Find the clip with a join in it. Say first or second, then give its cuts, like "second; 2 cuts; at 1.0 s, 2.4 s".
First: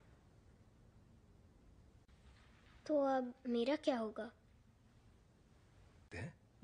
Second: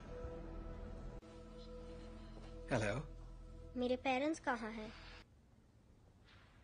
second; 1 cut; at 5.3 s